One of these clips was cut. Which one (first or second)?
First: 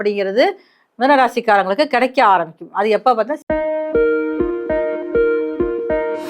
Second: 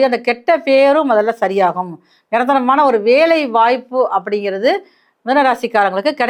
first